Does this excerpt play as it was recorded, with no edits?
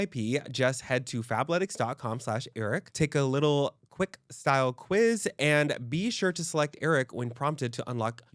yes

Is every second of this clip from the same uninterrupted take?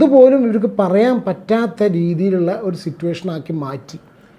yes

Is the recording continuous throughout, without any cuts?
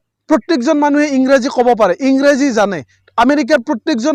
yes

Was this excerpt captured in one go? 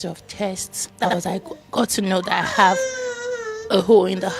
no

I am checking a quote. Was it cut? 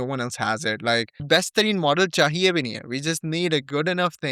yes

